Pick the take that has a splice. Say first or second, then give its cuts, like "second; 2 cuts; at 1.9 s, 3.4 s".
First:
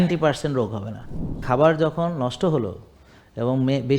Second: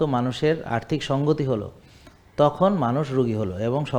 first; 1 cut; at 1.4 s